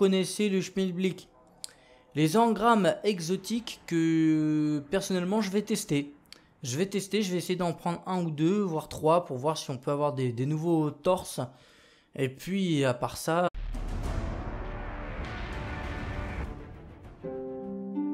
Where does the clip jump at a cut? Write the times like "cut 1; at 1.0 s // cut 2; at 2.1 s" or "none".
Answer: none

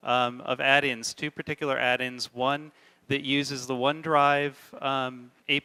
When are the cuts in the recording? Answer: none

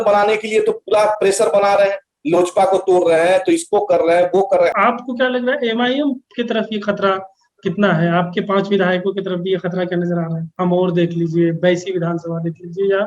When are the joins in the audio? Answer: cut 1; at 4.7 s // cut 2; at 10.5 s

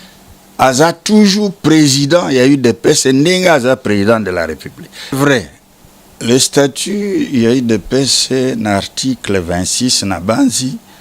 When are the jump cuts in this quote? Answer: cut 1; at 5.1 s

